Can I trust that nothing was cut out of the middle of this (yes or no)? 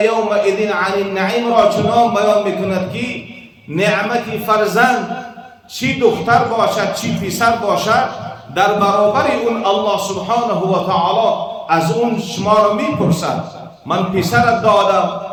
yes